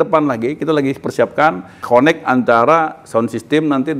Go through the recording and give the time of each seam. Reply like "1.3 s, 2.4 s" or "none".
1.8 s